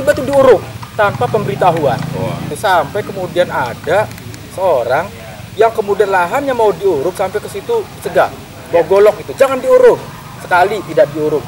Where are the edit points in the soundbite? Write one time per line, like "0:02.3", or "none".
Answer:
0:02.5